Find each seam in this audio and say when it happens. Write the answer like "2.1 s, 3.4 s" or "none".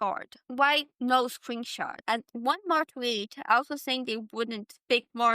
1.9 s